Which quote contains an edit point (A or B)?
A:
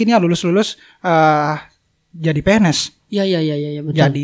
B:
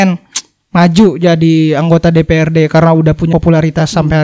B